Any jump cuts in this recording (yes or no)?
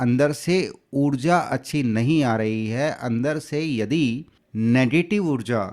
yes